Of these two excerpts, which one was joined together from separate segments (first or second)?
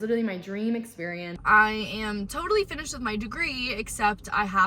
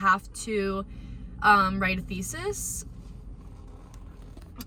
first